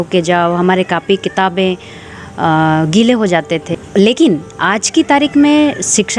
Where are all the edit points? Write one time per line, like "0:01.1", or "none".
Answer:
0:03.7

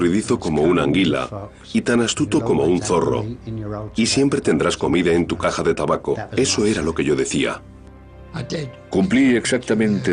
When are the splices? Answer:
0:03.3

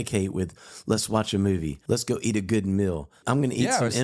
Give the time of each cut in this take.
0:01.8
0:03.1

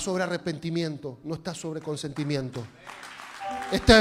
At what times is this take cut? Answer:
none

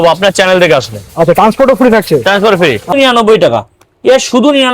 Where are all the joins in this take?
0:02.9

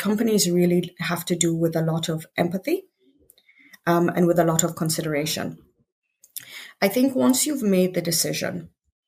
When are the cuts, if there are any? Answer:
none

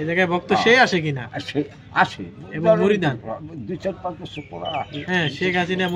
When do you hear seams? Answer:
none

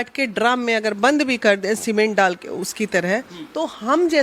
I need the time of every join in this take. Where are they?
none

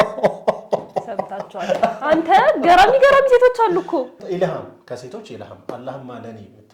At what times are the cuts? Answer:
0:04.2

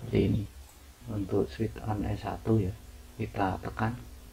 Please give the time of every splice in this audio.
0:01.0

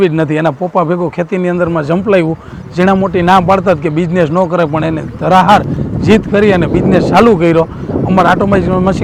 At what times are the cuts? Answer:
none

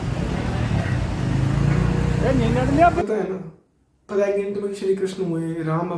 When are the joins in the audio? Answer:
0:03.0

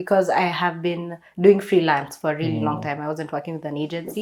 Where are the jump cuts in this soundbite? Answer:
none

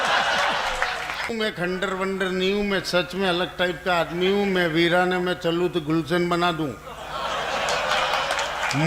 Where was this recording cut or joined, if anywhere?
0:01.3

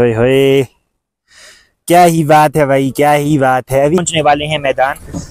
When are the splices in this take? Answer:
0:04.0

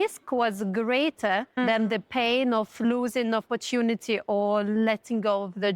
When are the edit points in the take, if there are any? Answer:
0:01.5
0:02.8

